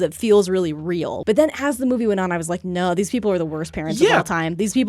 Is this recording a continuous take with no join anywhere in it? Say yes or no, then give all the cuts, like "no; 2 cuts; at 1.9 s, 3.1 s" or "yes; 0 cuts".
no; 1 cut; at 1.1 s